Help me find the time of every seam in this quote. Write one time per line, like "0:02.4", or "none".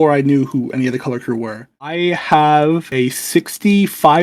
0:01.9